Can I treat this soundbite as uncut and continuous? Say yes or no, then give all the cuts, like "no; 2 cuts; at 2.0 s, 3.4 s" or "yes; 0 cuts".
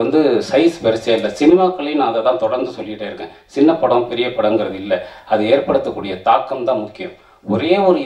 yes; 0 cuts